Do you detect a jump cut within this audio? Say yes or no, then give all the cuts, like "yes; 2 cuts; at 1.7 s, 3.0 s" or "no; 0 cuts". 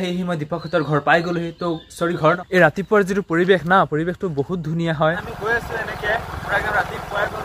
yes; 2 cuts; at 2.2 s, 5.0 s